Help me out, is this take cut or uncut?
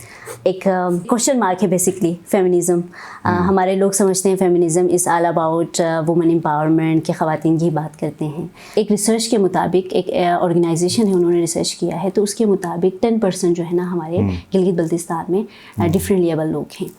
cut